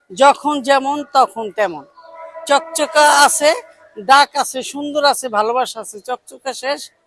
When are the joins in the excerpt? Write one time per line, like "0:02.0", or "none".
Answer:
none

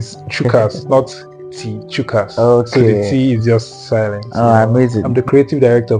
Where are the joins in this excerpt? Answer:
0:05.1

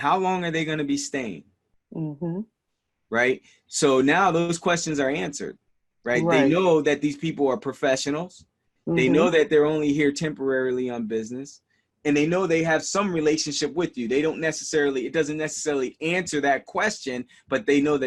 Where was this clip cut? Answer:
none

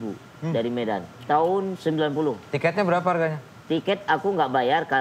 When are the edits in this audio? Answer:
0:01.1

